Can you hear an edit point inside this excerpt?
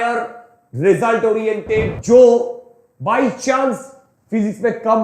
yes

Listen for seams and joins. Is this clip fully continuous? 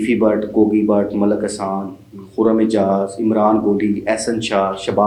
yes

